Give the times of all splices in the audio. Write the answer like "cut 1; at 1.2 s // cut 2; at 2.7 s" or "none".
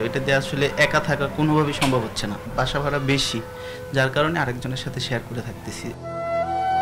none